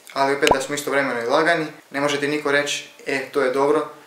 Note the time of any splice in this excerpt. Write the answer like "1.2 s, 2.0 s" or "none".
1.8 s